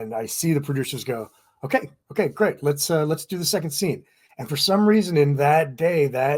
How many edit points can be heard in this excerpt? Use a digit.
0